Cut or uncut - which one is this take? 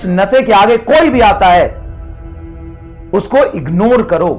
cut